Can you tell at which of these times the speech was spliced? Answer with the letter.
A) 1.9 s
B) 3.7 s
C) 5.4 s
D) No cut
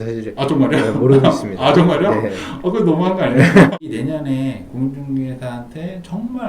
B